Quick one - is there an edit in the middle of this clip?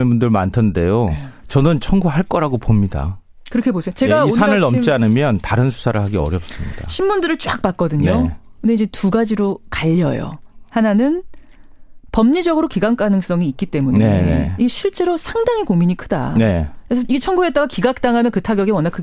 no; 0 cuts

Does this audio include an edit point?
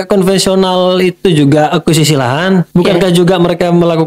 yes; 1 cut; at 2.7 s

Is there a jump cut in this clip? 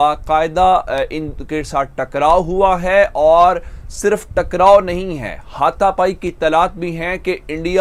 no; 0 cuts

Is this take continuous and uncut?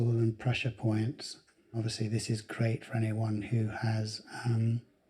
no; 1 cut; at 1.8 s

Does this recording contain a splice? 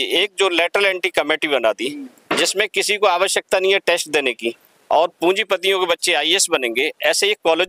no; 0 cuts

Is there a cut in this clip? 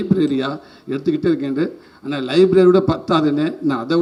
no; 0 cuts

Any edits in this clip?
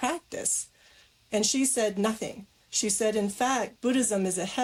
no; 0 cuts

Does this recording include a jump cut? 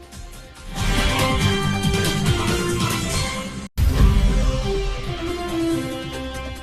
yes; 1 cut; at 3.8 s

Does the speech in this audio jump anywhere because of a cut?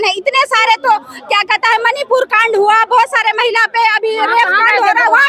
no; 0 cuts

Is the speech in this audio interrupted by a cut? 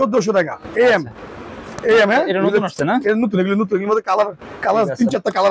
no; 0 cuts

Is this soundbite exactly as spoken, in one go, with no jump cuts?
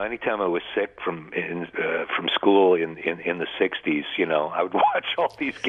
yes; 0 cuts

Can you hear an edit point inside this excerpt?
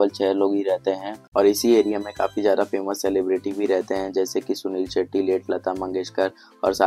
yes; 1 cut; at 1.1 s

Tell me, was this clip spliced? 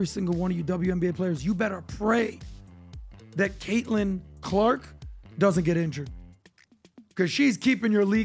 no; 0 cuts

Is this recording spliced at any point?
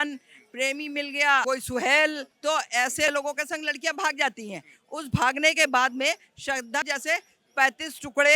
yes; 2 cuts; at 1.4 s, 6.8 s

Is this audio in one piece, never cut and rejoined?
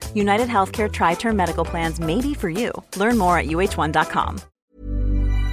no; 1 cut; at 4.5 s

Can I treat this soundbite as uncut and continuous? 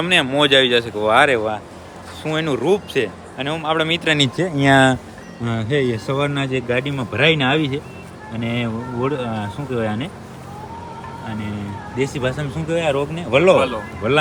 yes; 0 cuts

